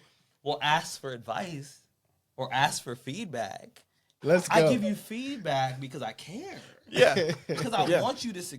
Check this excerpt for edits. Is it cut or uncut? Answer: cut